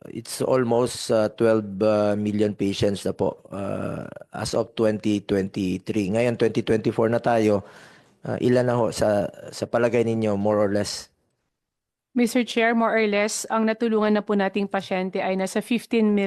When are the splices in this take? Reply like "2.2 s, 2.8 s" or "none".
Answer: none